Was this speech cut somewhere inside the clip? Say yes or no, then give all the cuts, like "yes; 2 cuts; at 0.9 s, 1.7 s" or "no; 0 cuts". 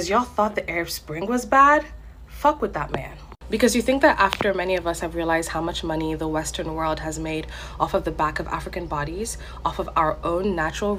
no; 0 cuts